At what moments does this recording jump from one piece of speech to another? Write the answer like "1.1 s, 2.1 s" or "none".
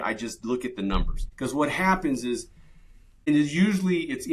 1.2 s, 3.3 s